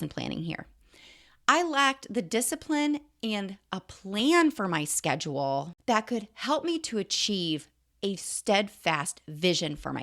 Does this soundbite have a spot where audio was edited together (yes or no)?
yes